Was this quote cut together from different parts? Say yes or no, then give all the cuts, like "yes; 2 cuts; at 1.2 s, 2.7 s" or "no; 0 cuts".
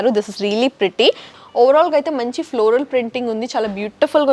yes; 1 cut; at 1.3 s